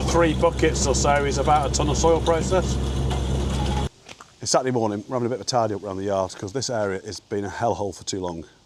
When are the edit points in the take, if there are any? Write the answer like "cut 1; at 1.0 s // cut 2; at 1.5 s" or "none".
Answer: none